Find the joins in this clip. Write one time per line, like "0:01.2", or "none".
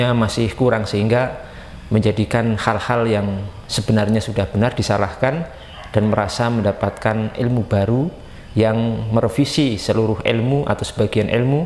none